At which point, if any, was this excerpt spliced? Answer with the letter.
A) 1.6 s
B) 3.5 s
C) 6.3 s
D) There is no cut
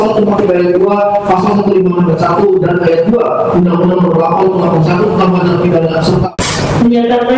C